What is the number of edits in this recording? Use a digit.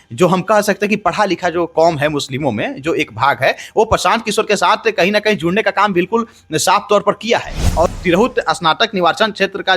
1